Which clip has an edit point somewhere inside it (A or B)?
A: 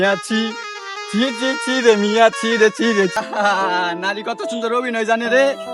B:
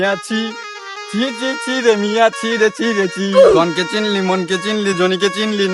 A